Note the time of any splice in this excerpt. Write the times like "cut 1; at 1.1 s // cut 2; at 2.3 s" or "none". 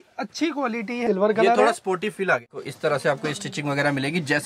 cut 1; at 1.0 s // cut 2; at 2.5 s